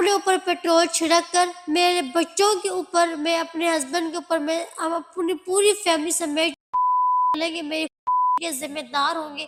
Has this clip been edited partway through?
no; 0 cuts

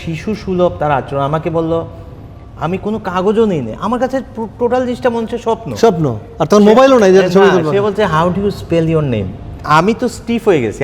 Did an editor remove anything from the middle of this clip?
yes; 1 cut; at 9.6 s

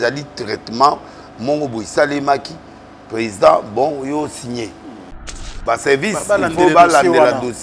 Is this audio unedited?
no; 1 cut; at 5.6 s

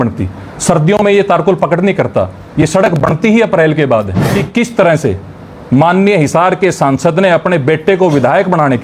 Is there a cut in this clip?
yes; 1 cut; at 4.2 s

